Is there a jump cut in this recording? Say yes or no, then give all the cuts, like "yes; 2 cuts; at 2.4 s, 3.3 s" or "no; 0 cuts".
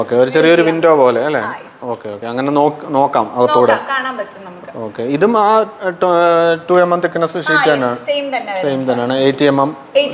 no; 0 cuts